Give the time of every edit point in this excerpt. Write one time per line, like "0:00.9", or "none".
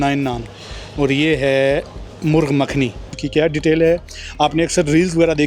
0:03.2